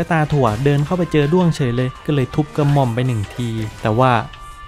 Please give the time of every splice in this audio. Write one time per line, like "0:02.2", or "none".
none